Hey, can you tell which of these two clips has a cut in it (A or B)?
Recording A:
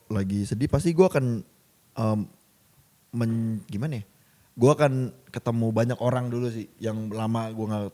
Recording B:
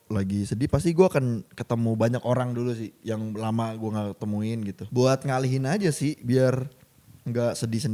B